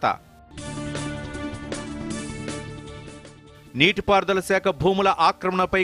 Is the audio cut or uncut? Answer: uncut